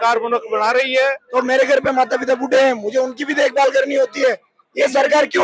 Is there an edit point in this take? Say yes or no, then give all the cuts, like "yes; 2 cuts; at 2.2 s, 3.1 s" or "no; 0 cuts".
yes; 1 cut; at 1.2 s